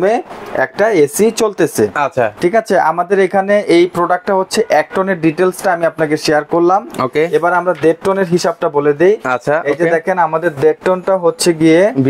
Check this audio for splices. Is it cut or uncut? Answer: uncut